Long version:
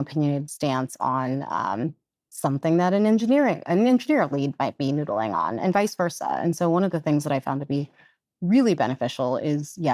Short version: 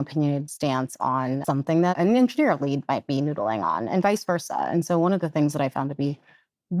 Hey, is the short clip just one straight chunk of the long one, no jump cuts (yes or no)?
no